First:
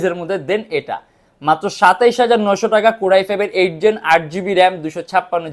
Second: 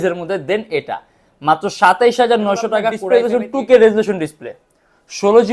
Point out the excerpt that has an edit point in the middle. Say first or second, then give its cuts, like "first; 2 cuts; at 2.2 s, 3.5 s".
second; 1 cut; at 3.0 s